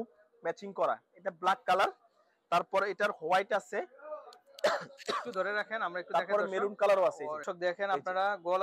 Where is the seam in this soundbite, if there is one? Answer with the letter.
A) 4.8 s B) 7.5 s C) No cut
B